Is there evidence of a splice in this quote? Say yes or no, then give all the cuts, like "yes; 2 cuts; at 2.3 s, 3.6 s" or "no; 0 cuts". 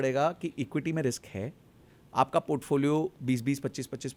no; 0 cuts